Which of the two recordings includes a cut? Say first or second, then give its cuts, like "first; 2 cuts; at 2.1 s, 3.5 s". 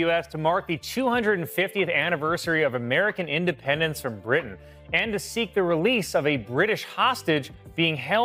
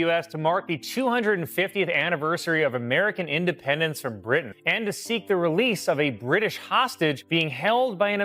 second; 2 cuts; at 4.6 s, 7.2 s